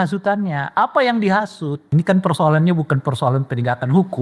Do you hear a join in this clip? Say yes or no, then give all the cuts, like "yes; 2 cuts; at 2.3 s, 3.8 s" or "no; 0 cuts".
yes; 1 cut; at 1.9 s